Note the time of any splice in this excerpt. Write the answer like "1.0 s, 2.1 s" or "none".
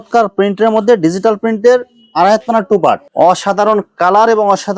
3.0 s